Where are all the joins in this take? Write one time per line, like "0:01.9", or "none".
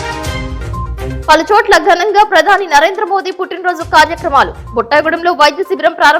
0:01.1